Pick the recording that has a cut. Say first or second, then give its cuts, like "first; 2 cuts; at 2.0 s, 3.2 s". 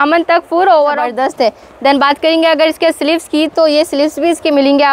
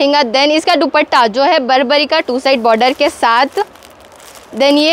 first; 1 cut; at 1.1 s